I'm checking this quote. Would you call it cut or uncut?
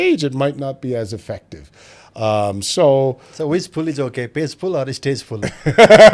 uncut